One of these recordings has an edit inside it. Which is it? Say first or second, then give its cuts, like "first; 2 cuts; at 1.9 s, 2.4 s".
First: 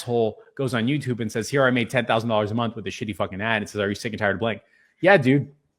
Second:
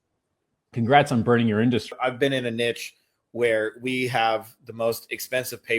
second; 1 cut; at 2.0 s